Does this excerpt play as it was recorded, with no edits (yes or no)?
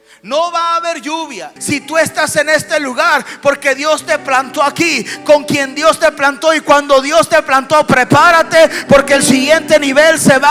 no